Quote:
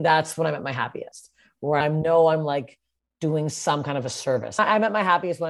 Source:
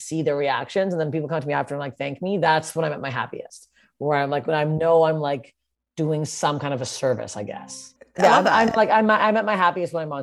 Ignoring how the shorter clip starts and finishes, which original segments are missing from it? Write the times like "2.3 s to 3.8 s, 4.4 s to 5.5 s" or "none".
4.2 s to 4.6 s, 7.3 s to 9.1 s